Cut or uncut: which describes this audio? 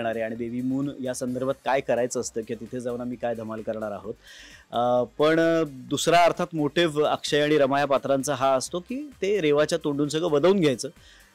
uncut